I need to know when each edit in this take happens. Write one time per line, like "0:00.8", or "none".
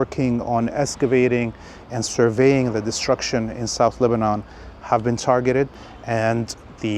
0:05.8